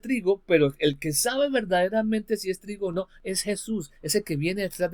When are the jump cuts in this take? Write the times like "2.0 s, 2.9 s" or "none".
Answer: none